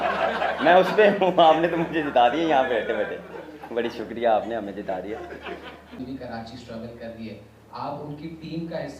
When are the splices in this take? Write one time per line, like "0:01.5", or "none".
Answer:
0:06.0